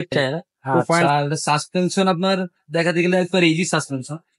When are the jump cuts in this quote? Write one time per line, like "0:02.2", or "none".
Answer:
0:01.0